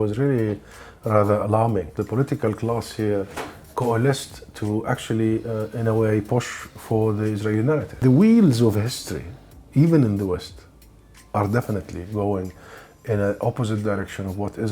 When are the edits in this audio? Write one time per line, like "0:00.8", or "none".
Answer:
0:01.9
0:07.9